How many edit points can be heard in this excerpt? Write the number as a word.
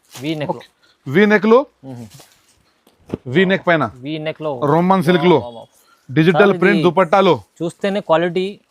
one